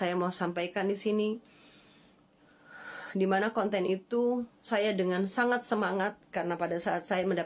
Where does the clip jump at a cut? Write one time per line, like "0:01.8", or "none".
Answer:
none